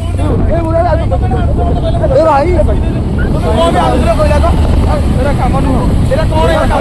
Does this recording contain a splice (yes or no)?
no